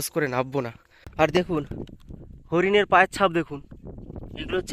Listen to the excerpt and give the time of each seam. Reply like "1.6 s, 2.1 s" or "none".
1.0 s